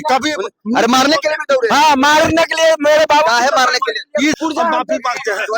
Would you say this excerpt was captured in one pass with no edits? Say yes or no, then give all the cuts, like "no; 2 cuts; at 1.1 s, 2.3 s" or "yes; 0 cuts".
no; 1 cut; at 4.4 s